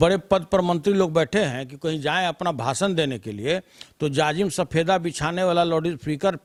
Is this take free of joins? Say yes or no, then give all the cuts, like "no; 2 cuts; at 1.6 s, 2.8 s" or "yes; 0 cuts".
yes; 0 cuts